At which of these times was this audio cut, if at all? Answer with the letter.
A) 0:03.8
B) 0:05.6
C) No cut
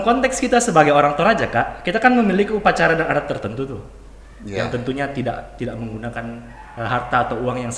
C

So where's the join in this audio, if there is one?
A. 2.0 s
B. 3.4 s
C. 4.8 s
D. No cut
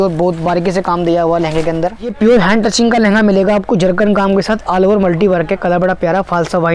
A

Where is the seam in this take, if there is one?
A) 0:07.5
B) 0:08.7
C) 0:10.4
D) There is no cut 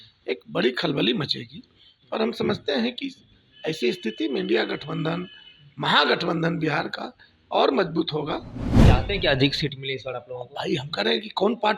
B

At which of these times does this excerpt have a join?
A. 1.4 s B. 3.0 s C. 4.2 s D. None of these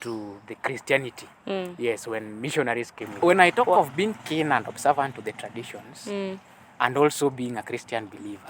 B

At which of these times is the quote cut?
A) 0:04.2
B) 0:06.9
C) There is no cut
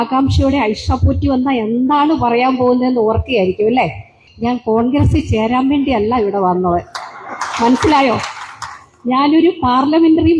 A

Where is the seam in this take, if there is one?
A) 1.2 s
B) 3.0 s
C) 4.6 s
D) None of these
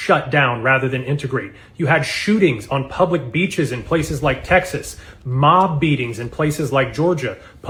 D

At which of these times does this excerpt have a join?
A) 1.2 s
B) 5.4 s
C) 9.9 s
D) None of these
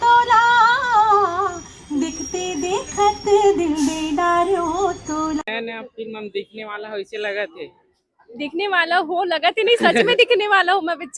B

